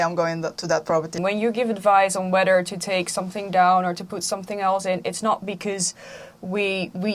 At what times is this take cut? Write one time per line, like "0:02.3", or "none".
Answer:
0:01.2